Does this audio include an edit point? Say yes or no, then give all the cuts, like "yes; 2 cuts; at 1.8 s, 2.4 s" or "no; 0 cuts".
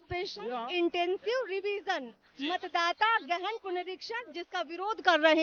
no; 0 cuts